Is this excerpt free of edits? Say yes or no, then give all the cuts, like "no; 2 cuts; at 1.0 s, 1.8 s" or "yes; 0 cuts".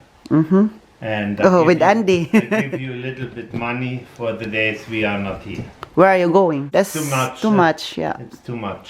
no; 1 cut; at 6.6 s